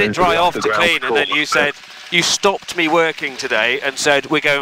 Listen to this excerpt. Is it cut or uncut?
uncut